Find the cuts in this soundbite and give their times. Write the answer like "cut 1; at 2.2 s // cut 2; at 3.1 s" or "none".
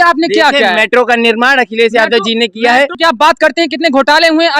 cut 1; at 2.9 s